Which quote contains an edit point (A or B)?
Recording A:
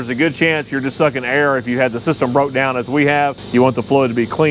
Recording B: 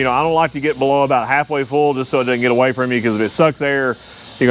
A